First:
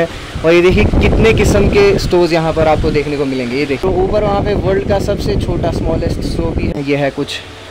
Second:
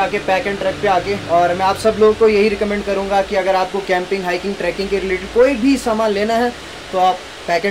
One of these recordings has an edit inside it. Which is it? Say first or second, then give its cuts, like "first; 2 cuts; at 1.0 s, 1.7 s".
first; 2 cuts; at 3.8 s, 6.7 s